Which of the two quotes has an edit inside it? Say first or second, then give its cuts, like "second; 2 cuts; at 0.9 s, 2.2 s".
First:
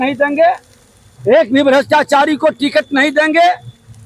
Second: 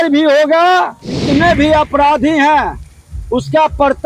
second; 1 cut; at 1.2 s